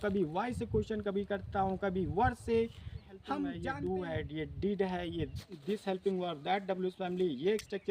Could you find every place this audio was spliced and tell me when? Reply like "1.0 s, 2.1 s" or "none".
3.6 s